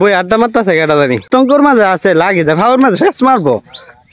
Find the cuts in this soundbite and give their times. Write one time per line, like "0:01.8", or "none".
0:01.3